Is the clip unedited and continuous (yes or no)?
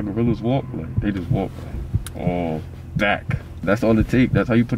no